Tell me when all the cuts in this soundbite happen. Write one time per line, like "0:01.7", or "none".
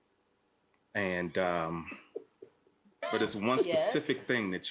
0:03.1